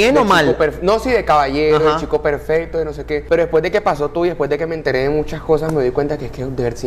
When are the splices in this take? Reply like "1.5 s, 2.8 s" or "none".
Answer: none